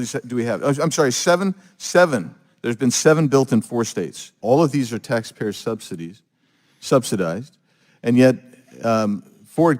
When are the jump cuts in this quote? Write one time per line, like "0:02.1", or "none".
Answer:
0:04.3